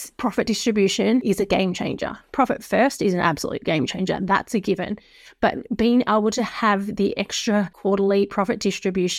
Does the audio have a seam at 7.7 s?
yes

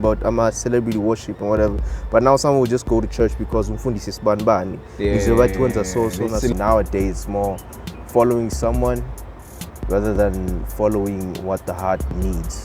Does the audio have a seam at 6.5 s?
yes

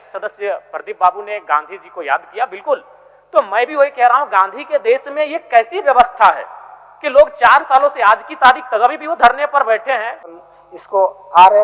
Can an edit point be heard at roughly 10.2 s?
yes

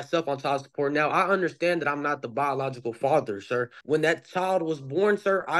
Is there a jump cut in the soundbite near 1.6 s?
no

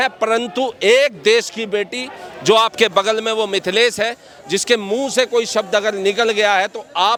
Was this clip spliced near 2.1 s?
no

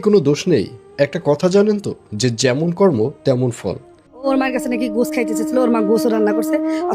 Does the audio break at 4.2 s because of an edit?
yes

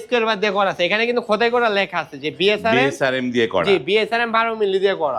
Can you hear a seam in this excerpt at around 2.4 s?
no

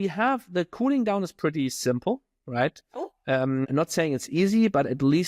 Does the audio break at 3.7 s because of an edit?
yes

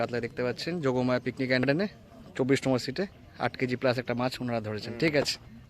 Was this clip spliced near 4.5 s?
no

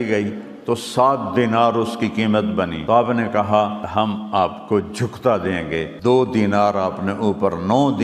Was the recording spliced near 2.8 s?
yes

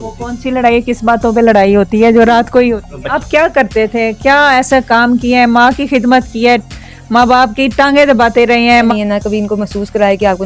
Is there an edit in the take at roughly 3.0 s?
yes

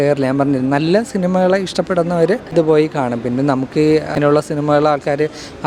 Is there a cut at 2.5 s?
no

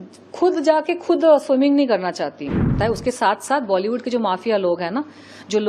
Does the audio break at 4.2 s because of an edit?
no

